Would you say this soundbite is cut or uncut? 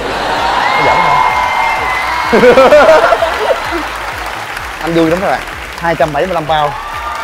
cut